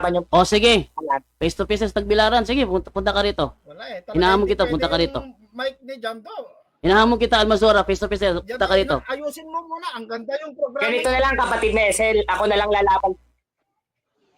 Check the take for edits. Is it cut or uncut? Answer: uncut